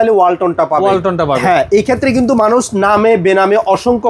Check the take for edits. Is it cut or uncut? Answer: uncut